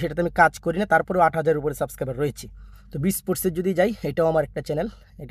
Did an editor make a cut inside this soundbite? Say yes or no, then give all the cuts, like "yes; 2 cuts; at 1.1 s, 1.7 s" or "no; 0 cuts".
no; 0 cuts